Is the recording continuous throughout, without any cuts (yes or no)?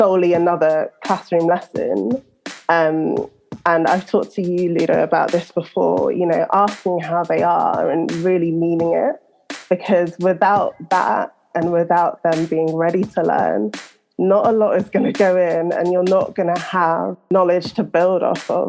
no